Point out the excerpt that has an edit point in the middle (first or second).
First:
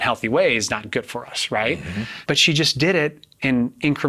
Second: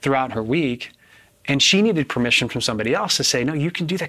first